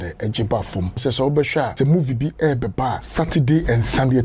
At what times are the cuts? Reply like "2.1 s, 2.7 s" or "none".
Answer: 1.0 s, 1.7 s, 3.0 s